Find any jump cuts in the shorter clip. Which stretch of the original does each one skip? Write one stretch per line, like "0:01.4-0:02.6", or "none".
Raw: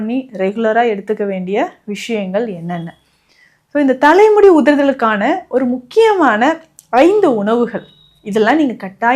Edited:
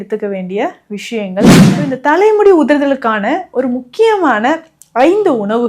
0:02.7-0:03.7